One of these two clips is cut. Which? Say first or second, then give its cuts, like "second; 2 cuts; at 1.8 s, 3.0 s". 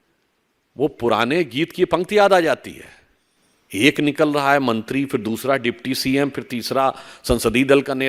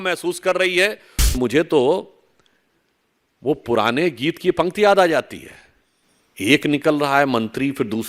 second; 1 cut; at 1.3 s